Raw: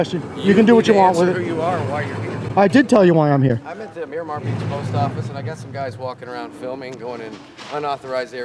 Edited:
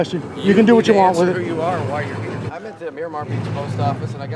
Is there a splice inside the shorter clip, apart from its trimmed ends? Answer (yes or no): yes